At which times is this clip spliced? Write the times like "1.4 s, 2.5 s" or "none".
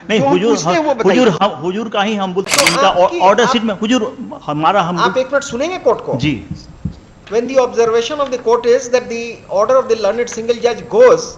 2.5 s